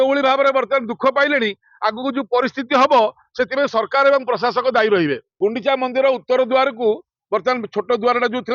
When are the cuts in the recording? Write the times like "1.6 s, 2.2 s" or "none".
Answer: 5.3 s